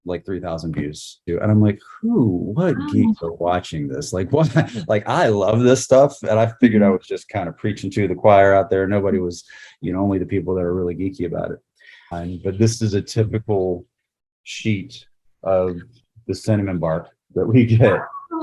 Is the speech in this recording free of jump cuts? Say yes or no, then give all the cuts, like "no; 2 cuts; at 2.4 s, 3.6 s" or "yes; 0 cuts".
no; 2 cuts; at 1.2 s, 12.1 s